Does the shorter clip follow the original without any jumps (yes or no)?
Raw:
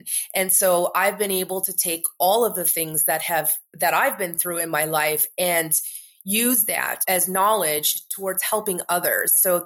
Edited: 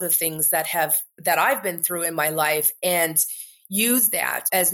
yes